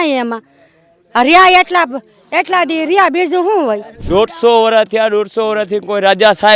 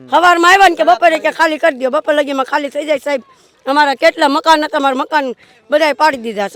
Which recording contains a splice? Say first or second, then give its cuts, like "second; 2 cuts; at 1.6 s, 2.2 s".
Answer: first; 1 cut; at 3.9 s